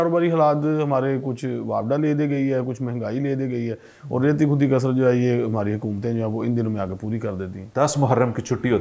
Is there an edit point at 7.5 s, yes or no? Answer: yes